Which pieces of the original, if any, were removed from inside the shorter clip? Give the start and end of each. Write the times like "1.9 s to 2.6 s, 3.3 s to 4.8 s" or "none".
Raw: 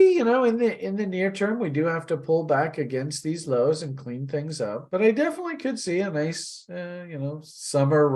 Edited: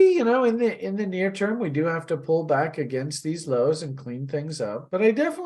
none